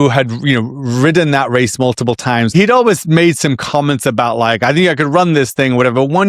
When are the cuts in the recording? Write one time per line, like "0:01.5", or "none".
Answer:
0:02.5